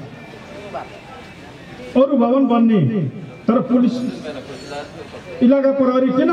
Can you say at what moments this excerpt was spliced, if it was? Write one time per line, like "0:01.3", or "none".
none